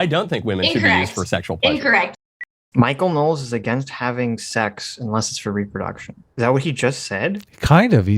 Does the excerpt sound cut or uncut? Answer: cut